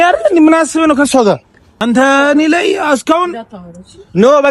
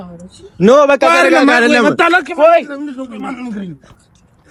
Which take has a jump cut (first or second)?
first